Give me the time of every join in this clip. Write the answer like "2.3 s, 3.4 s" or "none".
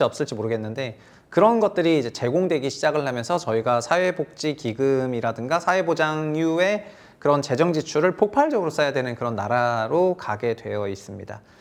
none